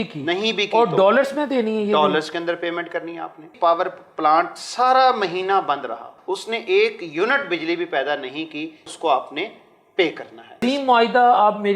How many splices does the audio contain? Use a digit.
4